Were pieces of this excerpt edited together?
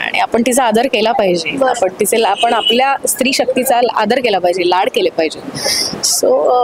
no; 0 cuts

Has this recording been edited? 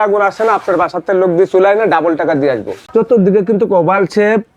yes; 1 cut; at 2.7 s

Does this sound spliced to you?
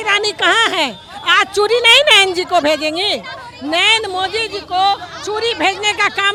no; 0 cuts

